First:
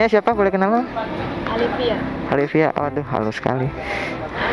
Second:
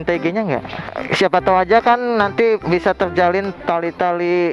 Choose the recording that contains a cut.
second; 1 cut; at 1.0 s

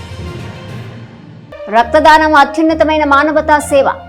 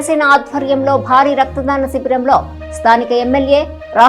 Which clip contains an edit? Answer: first; 1 cut; at 1.7 s

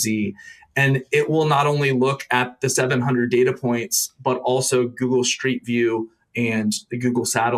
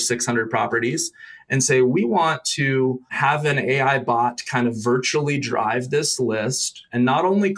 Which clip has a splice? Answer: second; 1 cut; at 3.1 s

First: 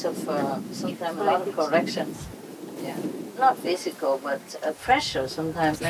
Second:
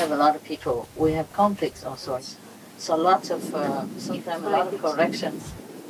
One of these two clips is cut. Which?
second; 1 cut; at 2.2 s

